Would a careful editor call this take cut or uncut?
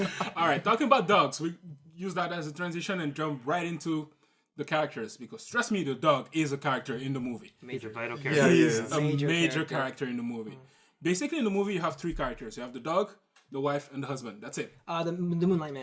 cut